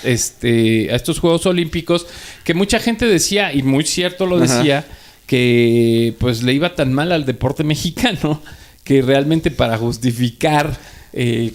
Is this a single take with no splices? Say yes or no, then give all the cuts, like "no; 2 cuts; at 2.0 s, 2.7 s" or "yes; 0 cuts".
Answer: yes; 0 cuts